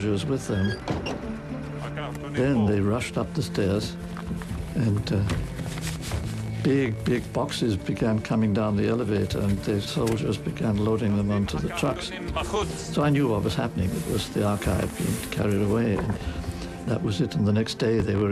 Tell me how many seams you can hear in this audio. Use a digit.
1